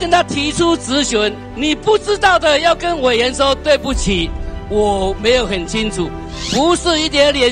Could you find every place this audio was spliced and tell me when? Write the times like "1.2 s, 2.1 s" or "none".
1.5 s, 6.2 s